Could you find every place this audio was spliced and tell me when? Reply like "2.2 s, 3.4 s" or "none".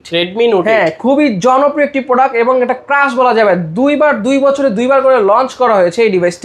none